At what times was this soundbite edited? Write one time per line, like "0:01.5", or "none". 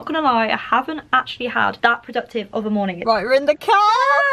0:01.8
0:03.0